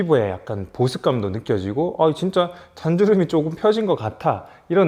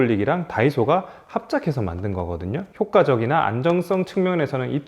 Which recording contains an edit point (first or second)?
second